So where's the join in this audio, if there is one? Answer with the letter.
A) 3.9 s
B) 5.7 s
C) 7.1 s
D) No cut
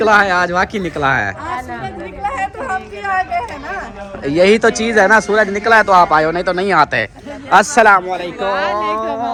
D